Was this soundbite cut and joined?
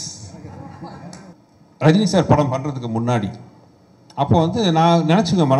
yes; 1 cut; at 1.3 s

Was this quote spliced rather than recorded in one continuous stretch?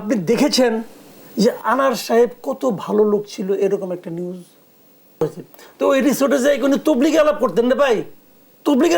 yes; 1 cut; at 5.2 s

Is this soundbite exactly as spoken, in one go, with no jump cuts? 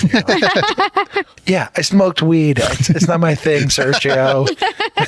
no; 1 cut; at 1.4 s

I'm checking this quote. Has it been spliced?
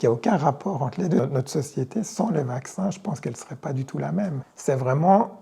yes; 2 cuts; at 1.2 s, 4.4 s

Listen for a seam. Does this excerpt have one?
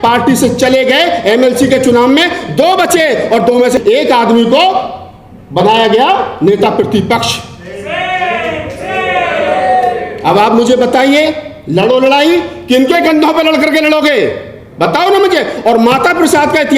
no; 0 cuts

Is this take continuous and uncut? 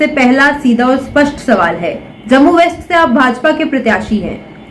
yes; 0 cuts

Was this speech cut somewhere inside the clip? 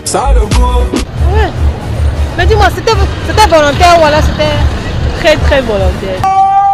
yes; 1 cut; at 1.1 s

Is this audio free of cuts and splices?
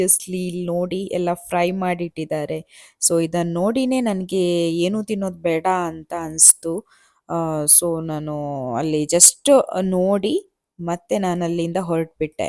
yes; 0 cuts

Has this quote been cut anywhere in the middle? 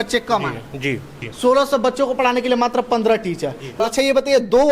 yes; 2 cuts; at 1.2 s, 3.8 s

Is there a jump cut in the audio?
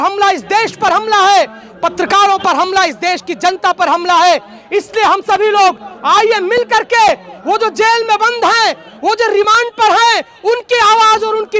no; 0 cuts

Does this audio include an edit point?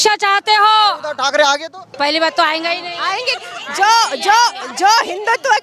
yes; 1 cut; at 1.8 s

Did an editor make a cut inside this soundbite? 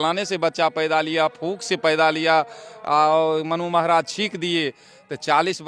no; 0 cuts

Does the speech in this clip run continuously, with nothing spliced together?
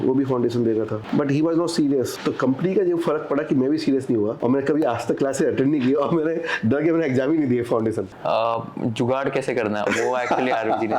no; 4 cuts; at 1.0 s, 2.1 s, 4.4 s, 8.1 s

